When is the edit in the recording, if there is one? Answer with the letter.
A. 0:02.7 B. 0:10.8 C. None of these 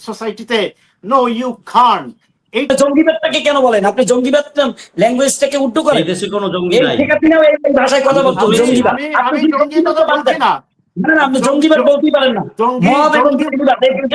A